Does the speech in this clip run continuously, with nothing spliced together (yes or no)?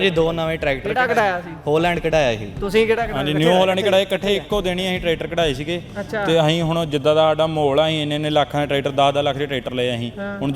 yes